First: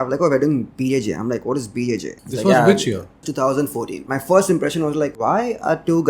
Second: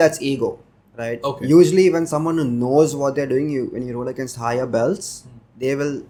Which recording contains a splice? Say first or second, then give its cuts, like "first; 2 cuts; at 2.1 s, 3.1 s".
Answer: first; 4 cuts; at 2.2 s, 3.3 s, 4.0 s, 5.1 s